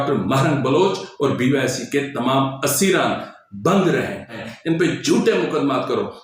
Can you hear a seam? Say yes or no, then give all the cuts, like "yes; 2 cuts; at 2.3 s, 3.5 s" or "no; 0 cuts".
yes; 1 cut; at 4.4 s